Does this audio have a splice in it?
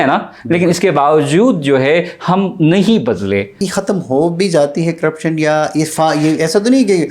yes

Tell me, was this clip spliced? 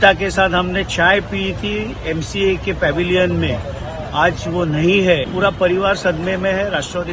yes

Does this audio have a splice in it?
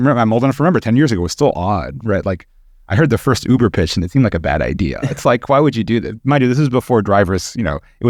no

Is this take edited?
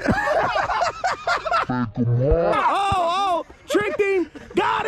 yes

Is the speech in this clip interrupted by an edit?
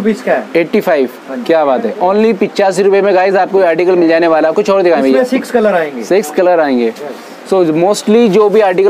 no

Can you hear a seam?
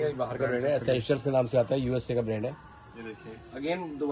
yes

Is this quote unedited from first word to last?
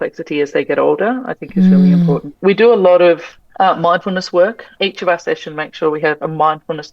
no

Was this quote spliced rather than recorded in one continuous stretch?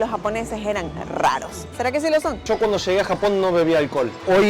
yes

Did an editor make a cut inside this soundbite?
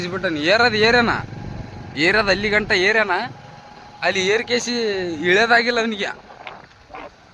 no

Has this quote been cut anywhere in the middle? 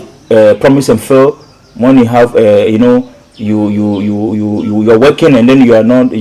no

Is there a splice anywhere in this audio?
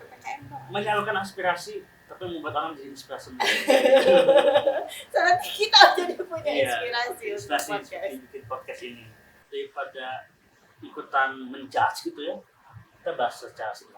yes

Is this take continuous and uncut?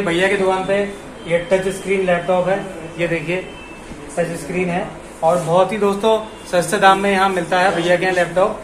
yes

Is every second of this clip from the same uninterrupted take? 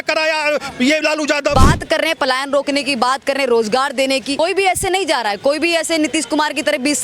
no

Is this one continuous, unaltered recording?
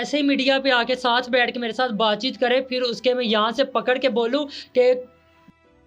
yes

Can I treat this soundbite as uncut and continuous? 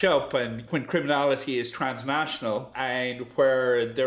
no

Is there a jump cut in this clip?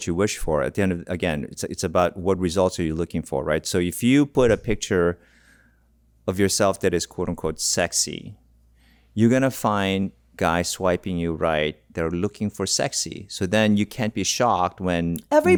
no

